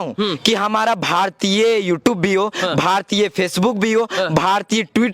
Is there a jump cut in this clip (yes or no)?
no